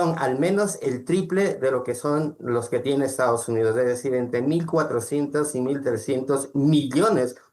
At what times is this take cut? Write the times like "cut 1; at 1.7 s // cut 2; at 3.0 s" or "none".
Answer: none